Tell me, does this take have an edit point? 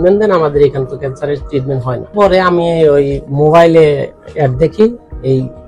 yes; 1 cut; at 2.1 s

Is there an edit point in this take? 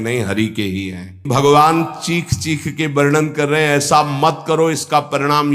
yes; 1 cut; at 1.2 s

